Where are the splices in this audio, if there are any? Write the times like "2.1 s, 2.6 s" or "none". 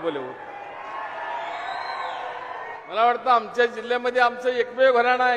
2.8 s